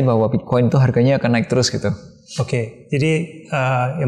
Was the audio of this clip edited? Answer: no; 0 cuts

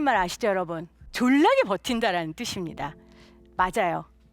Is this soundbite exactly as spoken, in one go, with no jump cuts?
no; 1 cut; at 1.0 s

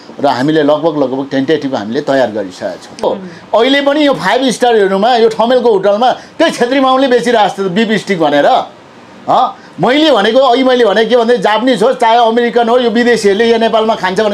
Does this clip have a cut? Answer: yes; 1 cut; at 3.0 s

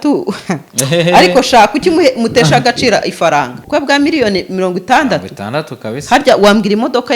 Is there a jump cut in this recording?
yes; 1 cut; at 3.6 s

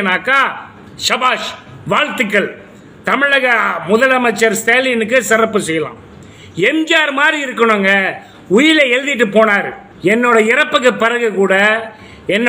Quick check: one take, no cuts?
no; 1 cut; at 9.8 s

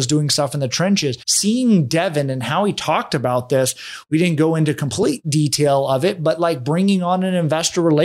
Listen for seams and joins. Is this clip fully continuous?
no; 1 cut; at 1.3 s

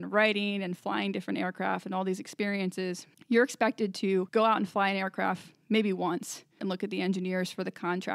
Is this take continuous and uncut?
no; 3 cuts; at 3.1 s, 4.3 s, 6.6 s

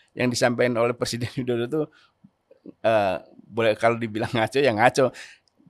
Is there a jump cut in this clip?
no; 0 cuts

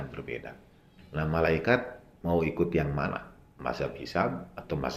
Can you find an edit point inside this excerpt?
no; 0 cuts

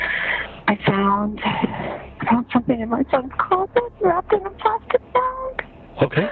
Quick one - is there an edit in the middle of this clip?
no; 0 cuts

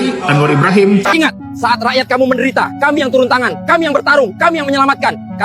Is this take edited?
yes; 1 cut; at 1.0 s

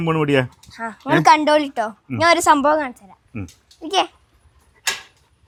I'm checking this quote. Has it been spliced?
no; 0 cuts

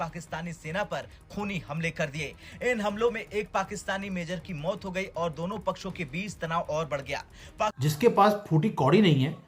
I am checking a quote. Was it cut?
yes; 1 cut; at 7.8 s

